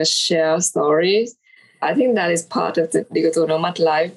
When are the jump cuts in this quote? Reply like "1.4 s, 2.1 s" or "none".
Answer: none